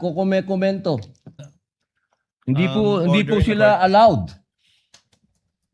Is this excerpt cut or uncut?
cut